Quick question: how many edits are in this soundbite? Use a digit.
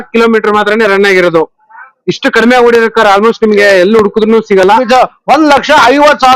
1